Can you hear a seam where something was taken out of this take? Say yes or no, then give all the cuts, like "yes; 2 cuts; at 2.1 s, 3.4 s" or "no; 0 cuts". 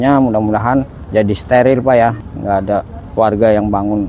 yes; 2 cuts; at 1.0 s, 2.2 s